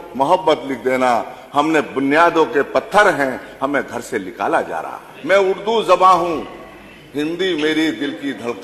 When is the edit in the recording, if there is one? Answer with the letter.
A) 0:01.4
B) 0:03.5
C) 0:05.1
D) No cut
C